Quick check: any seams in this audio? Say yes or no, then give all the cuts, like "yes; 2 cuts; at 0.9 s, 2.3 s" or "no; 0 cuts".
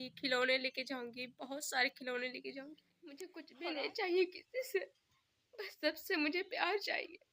yes; 1 cut; at 3.4 s